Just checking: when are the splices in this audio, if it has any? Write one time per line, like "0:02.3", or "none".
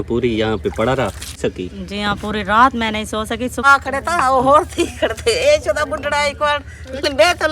0:01.4
0:03.7